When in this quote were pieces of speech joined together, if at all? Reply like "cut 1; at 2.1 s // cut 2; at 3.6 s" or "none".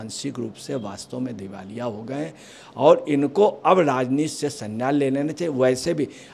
none